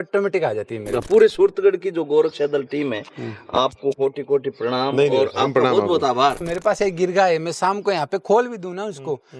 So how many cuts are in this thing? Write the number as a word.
two